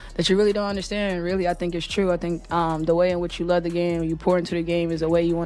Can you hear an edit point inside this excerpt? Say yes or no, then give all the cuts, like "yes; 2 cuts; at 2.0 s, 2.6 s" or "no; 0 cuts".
no; 0 cuts